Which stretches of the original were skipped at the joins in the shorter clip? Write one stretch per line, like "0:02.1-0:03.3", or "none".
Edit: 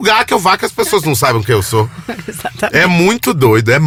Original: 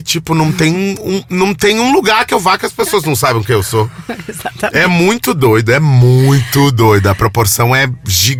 none